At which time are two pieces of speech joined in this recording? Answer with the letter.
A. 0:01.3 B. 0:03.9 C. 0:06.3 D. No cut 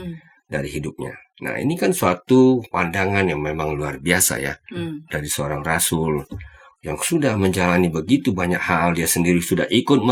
D